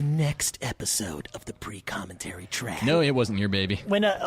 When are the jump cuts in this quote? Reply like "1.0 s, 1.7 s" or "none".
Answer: 2.8 s